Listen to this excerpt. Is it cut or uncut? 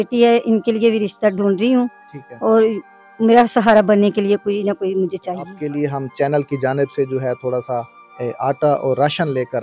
cut